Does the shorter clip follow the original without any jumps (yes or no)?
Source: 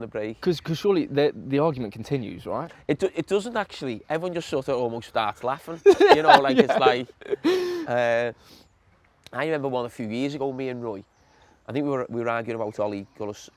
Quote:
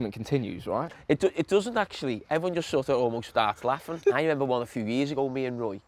no